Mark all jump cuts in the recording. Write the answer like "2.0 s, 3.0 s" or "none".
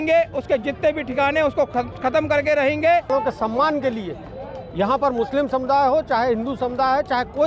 3.1 s